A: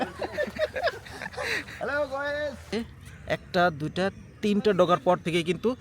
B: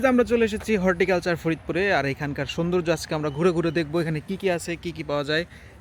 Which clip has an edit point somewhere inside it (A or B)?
A